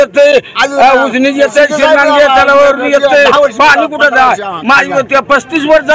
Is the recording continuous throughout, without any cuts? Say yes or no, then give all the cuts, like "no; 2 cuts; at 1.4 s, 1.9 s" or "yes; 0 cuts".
yes; 0 cuts